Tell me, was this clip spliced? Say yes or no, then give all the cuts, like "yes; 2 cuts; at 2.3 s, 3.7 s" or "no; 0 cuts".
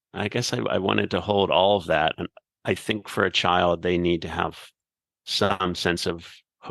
no; 0 cuts